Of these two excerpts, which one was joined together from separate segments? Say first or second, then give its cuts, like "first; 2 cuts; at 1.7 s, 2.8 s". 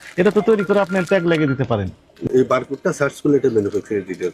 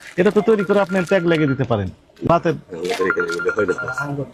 first; 1 cut; at 2.3 s